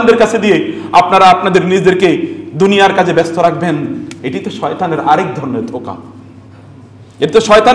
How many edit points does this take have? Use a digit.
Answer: 0